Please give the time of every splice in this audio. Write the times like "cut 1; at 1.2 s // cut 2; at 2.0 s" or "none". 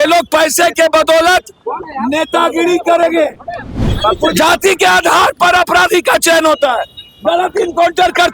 cut 1; at 3.9 s